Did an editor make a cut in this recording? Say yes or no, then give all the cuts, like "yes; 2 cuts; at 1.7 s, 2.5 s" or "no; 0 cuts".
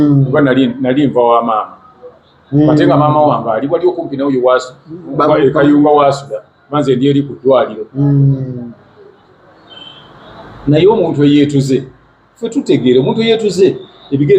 no; 0 cuts